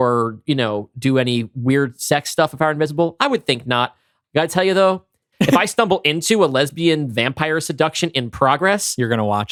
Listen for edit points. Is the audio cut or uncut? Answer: uncut